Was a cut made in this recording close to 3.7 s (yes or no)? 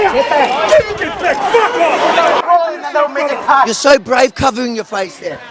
yes